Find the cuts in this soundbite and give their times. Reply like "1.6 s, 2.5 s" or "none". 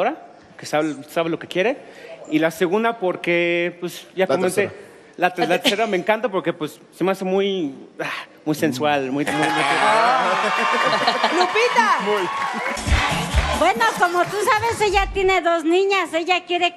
6.0 s